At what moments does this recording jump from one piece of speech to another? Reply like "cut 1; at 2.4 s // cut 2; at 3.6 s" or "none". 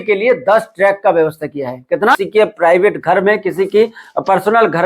cut 1; at 2.2 s